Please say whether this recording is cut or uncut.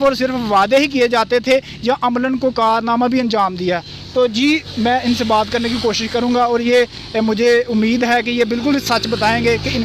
uncut